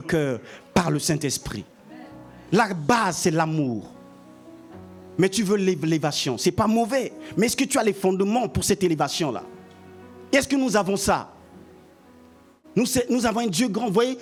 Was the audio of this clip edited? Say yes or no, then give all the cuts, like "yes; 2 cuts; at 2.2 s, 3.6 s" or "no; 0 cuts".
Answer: no; 0 cuts